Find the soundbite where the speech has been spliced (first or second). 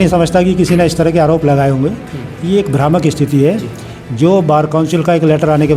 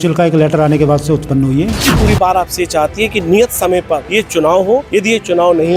second